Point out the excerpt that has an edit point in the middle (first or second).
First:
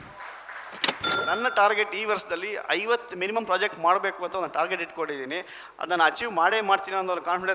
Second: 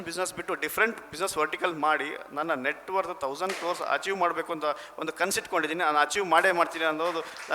first